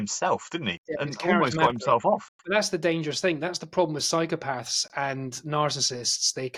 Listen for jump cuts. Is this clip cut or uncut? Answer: uncut